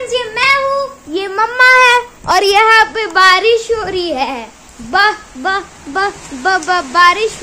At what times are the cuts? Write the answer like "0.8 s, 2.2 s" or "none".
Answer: none